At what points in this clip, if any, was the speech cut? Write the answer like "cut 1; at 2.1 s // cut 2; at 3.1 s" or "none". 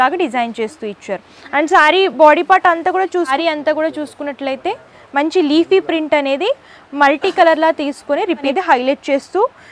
cut 1; at 3.3 s // cut 2; at 8.5 s